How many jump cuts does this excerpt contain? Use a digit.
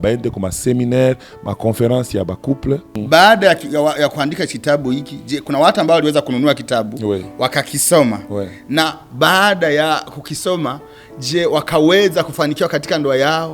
1